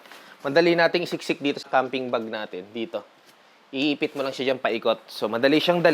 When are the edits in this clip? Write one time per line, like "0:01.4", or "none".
0:01.7